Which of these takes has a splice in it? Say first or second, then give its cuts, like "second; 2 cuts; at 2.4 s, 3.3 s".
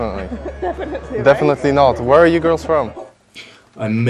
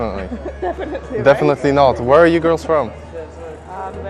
second; 1 cut; at 3.0 s